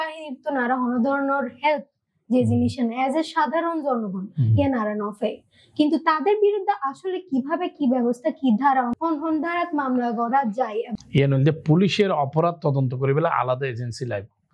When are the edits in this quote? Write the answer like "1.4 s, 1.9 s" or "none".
8.9 s, 10.9 s